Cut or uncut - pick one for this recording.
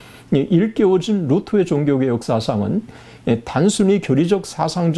uncut